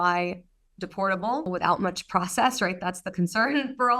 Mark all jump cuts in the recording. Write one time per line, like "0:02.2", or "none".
0:01.5